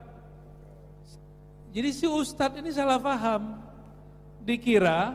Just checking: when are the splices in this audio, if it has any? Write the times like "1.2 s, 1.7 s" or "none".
1.1 s

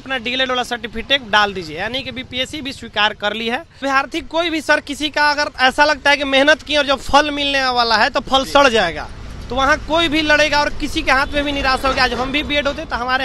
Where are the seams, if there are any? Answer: 3.8 s

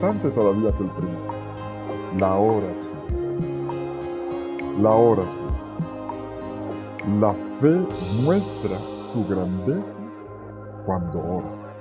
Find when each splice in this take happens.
none

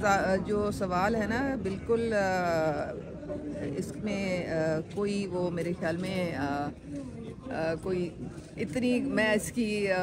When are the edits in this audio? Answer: none

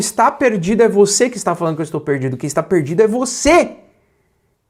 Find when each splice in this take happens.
none

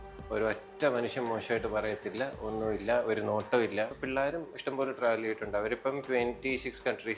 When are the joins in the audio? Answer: 4.0 s

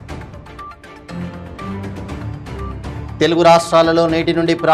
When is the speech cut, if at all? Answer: 1.1 s

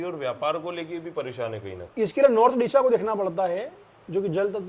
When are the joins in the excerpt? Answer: 1.8 s

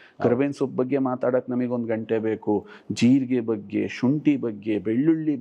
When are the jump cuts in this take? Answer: none

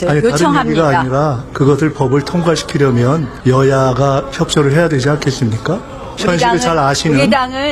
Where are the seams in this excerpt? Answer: 3.3 s, 6.0 s

